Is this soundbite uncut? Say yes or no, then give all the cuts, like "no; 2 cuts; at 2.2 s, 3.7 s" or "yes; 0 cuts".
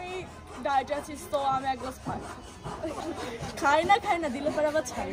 no; 1 cut; at 3.0 s